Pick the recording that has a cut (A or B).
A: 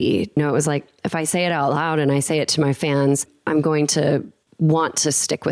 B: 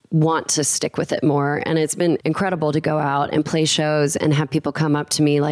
B